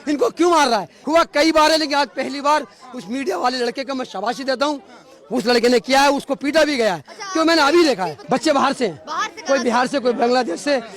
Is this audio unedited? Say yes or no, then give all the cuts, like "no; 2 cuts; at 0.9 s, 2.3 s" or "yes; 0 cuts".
no; 2 cuts; at 0.9 s, 8.2 s